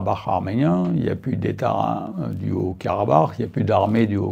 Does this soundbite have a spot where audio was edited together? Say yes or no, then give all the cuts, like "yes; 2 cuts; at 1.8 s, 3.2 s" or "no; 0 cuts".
no; 0 cuts